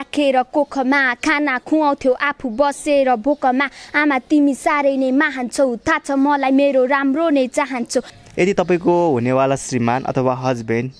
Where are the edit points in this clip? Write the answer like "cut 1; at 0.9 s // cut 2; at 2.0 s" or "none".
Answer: cut 1; at 8.2 s